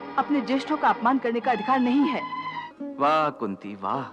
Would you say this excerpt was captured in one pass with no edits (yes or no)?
no